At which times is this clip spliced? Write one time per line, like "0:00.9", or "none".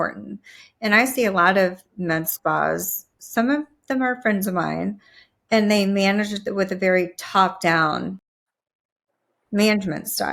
none